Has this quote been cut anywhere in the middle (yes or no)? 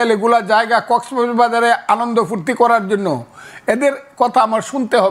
no